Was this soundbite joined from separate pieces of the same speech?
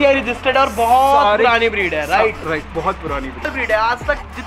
yes; 1 cut; at 3.5 s

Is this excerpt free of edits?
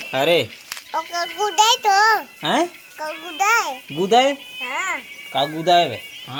yes; 0 cuts

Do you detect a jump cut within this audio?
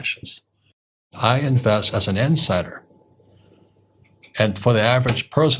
yes; 1 cut; at 1.0 s

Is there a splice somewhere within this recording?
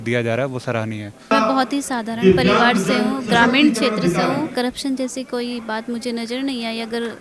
yes; 2 cuts; at 1.1 s, 4.5 s

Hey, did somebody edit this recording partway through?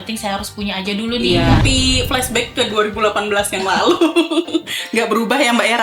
yes; 1 cut; at 1.6 s

